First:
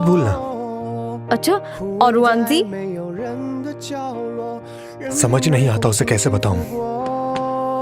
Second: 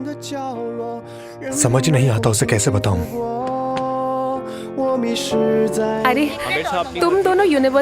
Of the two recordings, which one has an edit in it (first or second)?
second